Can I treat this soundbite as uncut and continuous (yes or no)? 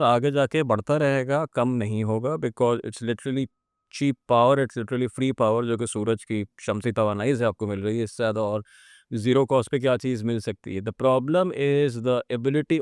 yes